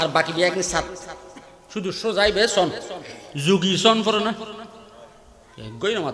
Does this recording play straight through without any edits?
yes; 0 cuts

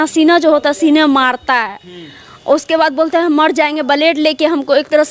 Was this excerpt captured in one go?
yes; 0 cuts

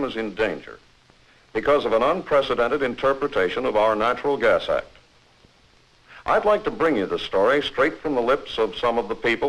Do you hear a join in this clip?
no; 0 cuts

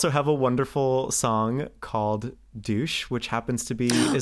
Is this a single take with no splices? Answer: yes; 0 cuts

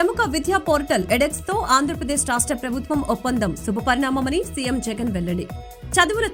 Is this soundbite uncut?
yes; 0 cuts

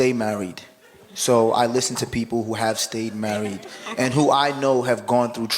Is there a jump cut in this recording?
no; 0 cuts

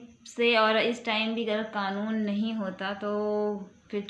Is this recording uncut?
yes; 0 cuts

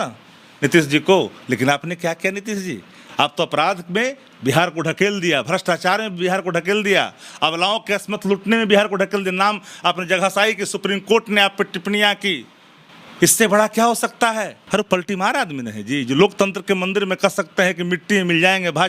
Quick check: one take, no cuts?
no; 1 cut; at 14.6 s

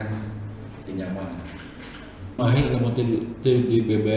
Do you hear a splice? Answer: yes; 1 cut; at 2.4 s

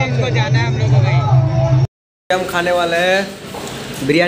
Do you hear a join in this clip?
yes; 1 cut; at 2.1 s

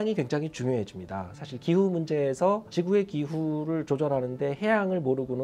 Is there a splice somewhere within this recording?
no; 0 cuts

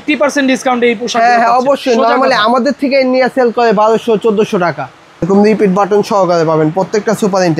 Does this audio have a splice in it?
yes; 1 cut; at 5.1 s

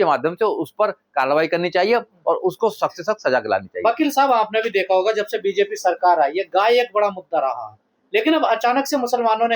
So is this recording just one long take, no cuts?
yes; 0 cuts

